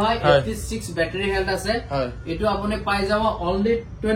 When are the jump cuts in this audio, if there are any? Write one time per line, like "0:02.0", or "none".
none